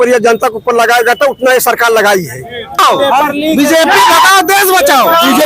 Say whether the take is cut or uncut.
cut